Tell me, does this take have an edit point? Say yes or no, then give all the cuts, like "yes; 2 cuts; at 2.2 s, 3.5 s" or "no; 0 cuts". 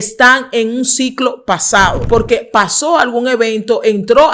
yes; 1 cut; at 2.0 s